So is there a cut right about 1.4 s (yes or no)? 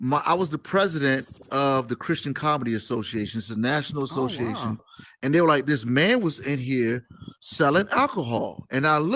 no